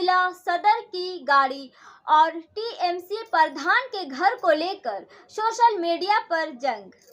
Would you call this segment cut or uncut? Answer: uncut